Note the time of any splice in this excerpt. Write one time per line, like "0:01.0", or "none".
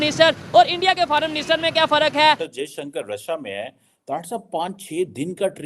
0:02.5